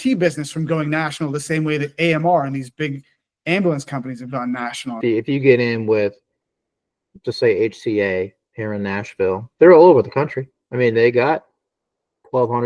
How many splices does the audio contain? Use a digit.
2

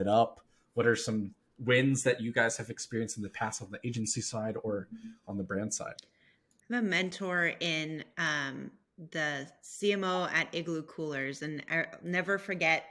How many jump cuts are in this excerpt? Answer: 0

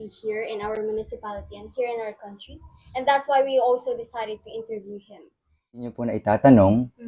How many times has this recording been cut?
1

